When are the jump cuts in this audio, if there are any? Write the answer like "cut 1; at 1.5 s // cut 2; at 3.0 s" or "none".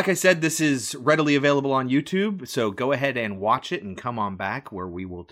none